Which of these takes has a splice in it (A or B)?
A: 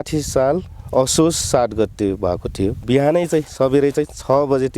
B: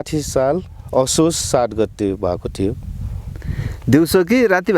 A